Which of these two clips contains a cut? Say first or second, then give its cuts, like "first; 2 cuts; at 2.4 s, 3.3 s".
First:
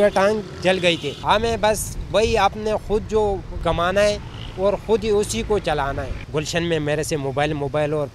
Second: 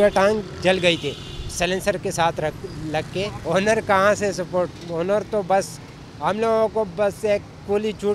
first; 3 cuts; at 1.1 s, 3.5 s, 6.1 s